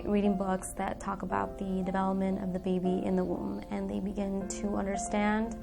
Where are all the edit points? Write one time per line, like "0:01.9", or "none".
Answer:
none